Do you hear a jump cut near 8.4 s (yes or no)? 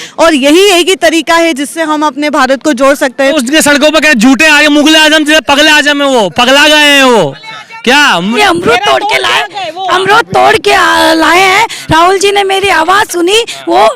yes